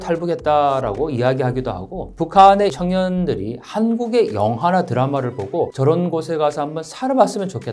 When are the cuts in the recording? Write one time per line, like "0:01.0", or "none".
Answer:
0:02.1
0:02.7
0:05.7